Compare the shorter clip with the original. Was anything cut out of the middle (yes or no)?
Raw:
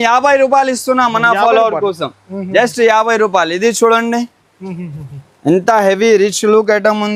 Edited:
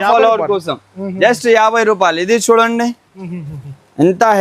yes